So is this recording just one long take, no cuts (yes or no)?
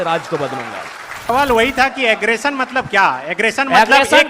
no